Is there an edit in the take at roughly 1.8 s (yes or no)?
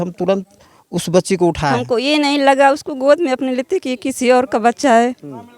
yes